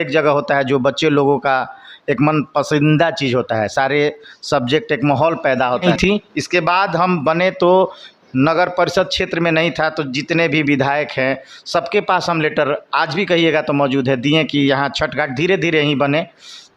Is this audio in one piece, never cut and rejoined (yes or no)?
no